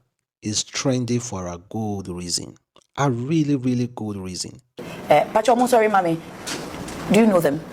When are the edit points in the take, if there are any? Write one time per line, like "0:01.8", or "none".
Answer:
0:04.9